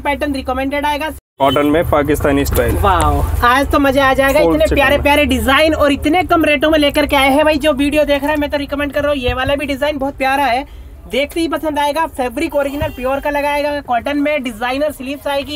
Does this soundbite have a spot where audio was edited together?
yes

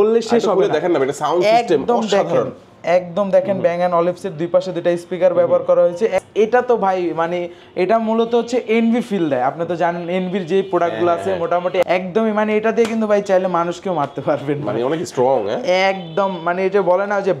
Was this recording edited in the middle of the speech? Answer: yes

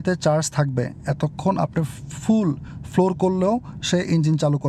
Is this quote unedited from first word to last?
yes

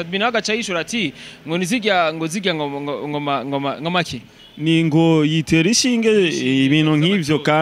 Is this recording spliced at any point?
no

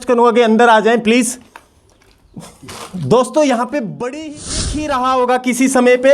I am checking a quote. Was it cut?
yes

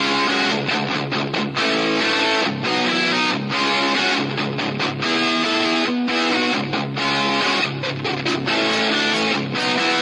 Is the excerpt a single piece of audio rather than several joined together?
no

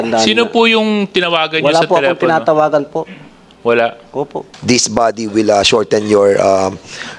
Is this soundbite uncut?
no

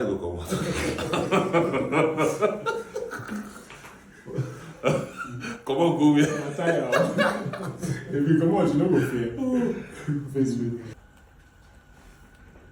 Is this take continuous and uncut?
yes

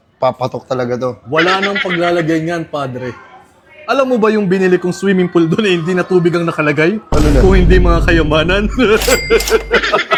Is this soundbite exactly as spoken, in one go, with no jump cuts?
yes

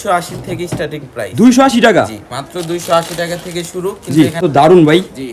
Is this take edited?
yes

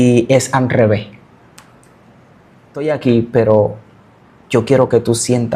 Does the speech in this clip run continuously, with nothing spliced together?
no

